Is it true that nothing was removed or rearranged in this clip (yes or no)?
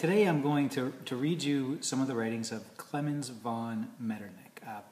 yes